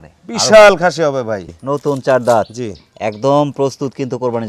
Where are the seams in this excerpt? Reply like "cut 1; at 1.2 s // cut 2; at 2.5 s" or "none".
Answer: cut 1; at 1.5 s